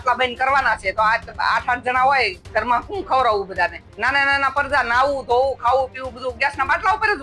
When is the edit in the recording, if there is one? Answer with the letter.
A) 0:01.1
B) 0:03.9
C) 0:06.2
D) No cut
B